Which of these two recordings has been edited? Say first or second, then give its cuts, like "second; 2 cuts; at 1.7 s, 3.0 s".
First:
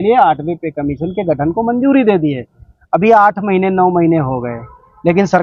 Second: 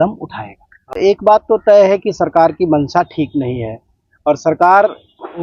second; 1 cut; at 0.9 s